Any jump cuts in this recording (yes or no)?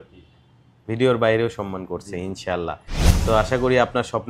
no